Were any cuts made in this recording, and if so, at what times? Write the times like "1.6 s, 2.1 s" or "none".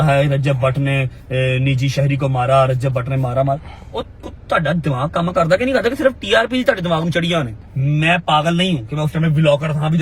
7.6 s

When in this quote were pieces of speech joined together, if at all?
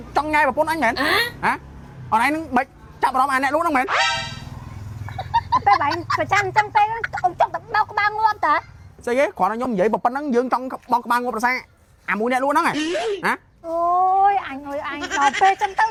none

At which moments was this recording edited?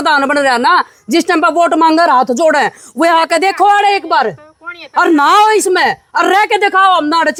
none

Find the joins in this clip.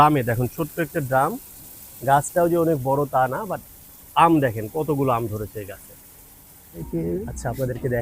6.8 s

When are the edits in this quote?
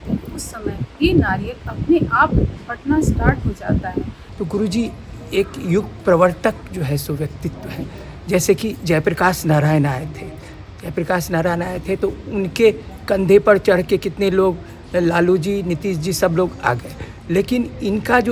4.2 s

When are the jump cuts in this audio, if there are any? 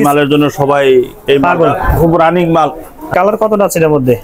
3.1 s

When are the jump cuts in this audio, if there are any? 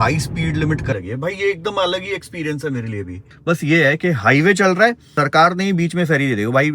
0.9 s, 3.2 s, 5.0 s

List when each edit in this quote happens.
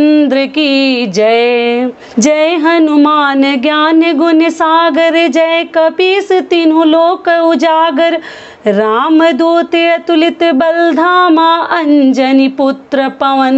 2.0 s

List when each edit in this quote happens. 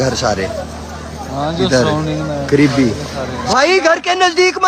3.4 s

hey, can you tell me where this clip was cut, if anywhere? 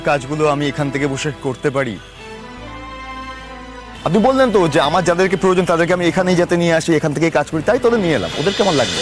none

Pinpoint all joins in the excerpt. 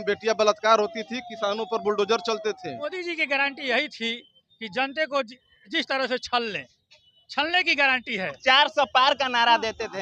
2.9 s, 8.4 s

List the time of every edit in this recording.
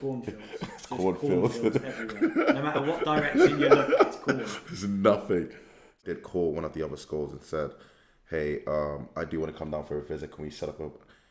5.9 s

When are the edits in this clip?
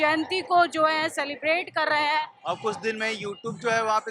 2.4 s

